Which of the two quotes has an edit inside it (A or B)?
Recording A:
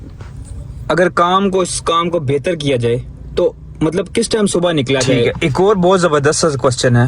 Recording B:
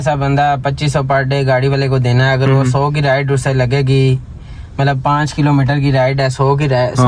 A